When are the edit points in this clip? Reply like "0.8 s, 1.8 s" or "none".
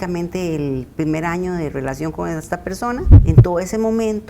3.2 s

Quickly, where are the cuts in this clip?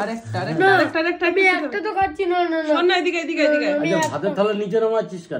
none

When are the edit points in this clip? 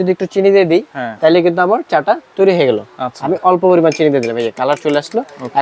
none

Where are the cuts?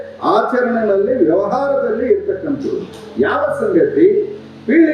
none

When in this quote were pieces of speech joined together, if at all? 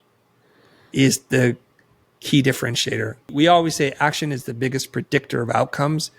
3.3 s

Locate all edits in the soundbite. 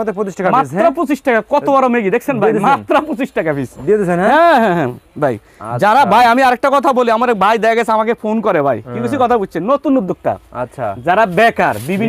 none

